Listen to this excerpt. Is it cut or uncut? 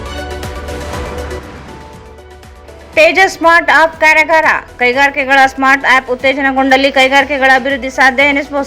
cut